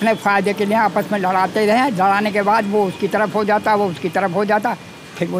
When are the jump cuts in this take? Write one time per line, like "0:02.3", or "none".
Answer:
none